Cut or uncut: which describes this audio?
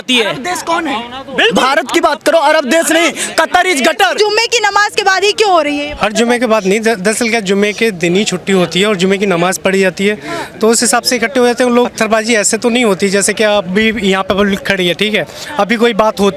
cut